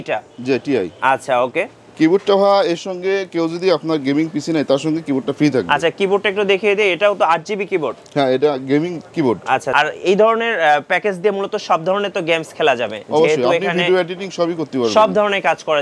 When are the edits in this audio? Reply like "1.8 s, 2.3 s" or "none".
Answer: 1.8 s, 9.7 s